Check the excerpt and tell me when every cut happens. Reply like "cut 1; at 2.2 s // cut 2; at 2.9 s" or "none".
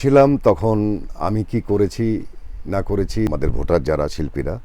cut 1; at 3.3 s